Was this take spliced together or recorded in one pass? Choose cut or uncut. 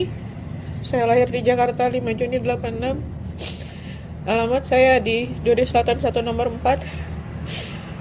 uncut